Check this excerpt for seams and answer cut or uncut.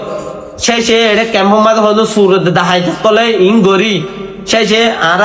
uncut